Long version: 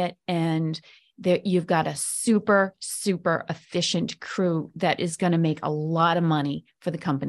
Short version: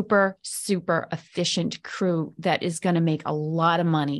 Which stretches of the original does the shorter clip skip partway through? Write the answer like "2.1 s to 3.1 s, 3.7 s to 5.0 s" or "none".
none